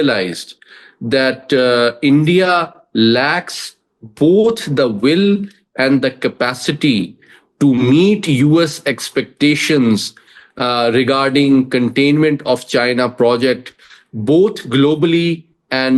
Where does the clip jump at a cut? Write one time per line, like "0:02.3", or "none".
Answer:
none